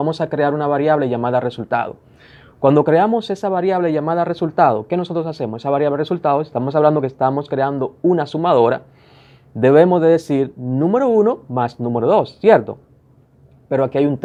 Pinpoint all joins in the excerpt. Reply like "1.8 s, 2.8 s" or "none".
none